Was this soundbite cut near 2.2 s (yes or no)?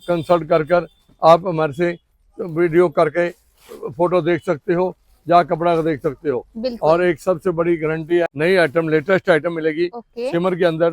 no